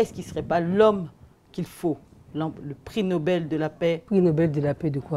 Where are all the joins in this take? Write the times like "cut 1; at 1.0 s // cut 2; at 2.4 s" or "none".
cut 1; at 4.0 s